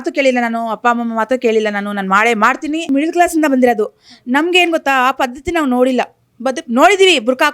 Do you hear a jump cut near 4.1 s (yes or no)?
no